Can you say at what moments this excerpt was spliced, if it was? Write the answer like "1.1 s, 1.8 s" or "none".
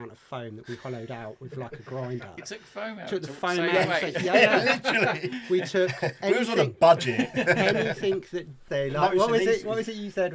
8.6 s